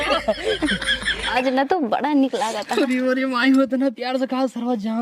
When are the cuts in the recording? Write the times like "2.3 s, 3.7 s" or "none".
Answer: 1.3 s